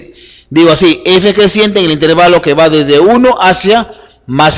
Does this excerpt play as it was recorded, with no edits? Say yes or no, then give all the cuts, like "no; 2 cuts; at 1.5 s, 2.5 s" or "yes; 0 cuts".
no; 1 cut; at 2.3 s